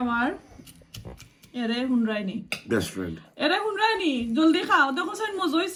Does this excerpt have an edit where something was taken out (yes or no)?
no